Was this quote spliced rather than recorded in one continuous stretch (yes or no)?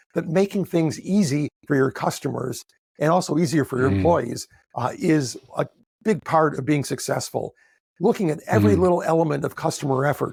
no